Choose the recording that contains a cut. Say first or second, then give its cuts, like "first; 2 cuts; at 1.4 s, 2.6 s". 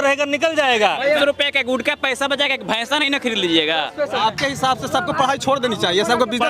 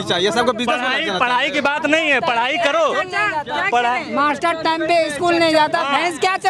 first; 2 cuts; at 1.2 s, 4.2 s